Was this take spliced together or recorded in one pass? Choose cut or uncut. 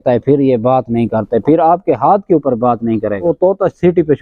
cut